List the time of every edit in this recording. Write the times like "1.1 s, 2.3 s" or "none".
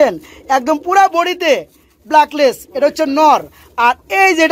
none

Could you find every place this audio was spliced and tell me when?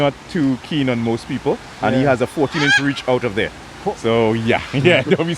none

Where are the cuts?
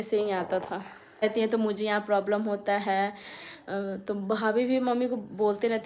1.2 s

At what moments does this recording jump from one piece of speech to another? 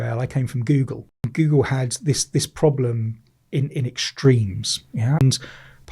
1.3 s, 5.2 s

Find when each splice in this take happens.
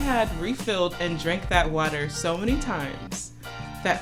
none

